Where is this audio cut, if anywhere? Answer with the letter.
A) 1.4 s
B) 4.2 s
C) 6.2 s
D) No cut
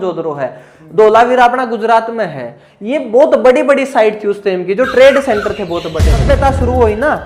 C